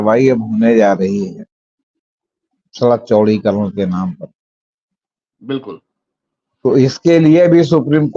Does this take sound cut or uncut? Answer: uncut